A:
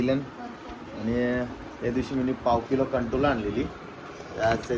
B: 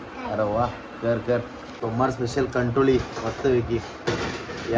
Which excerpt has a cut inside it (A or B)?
B